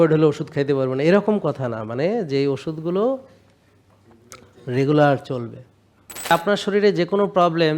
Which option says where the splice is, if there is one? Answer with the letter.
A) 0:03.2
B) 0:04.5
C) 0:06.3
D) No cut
C